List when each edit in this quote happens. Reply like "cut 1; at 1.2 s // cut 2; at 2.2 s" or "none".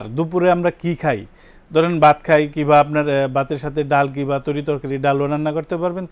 none